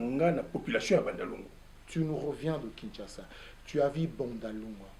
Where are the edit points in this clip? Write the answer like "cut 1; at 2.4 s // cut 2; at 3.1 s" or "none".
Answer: cut 1; at 1.8 s